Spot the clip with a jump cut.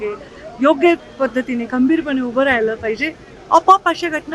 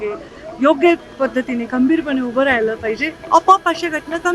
second; 1 cut; at 3.1 s

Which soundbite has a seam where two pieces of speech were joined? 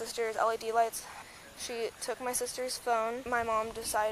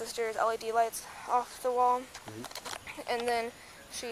first; 2 cuts; at 1.2 s, 3.2 s

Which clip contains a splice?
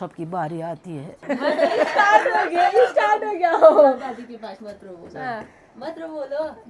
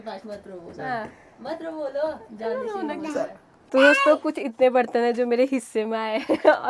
second; 1 cut; at 3.6 s

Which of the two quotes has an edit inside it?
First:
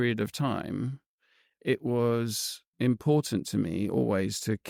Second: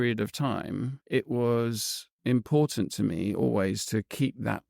second; 1 cut; at 1.0 s

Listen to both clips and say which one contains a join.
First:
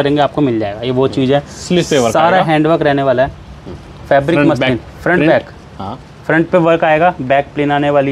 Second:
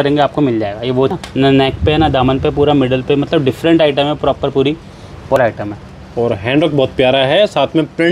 second; 2 cuts; at 1.1 s, 5.4 s

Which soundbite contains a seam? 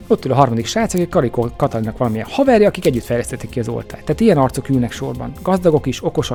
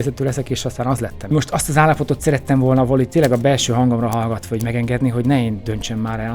second; 1 cut; at 1.3 s

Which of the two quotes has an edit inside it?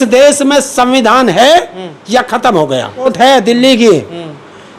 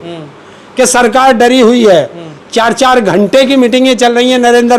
first; 1 cut; at 3.1 s

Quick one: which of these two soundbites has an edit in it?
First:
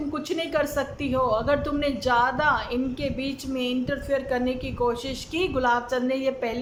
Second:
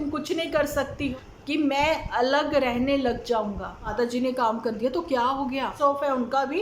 second; 3 cuts; at 1.1 s, 3.9 s, 5.7 s

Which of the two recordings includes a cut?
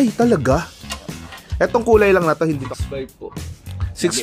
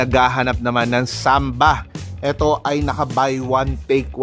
first; 1 cut; at 2.6 s

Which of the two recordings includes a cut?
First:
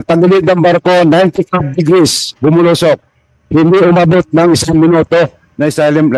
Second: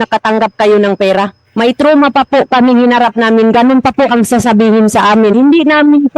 second; 2 cuts; at 1.4 s, 5.3 s

